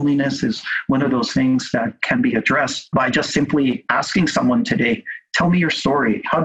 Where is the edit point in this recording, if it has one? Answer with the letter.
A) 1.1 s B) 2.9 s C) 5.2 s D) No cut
B